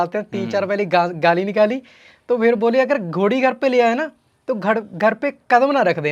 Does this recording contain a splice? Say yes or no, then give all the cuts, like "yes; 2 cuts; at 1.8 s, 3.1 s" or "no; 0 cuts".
no; 0 cuts